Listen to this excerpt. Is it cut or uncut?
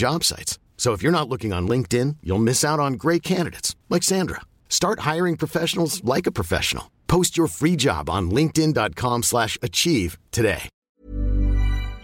cut